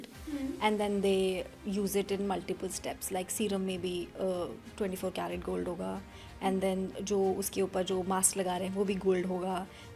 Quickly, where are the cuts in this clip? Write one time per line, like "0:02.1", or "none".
none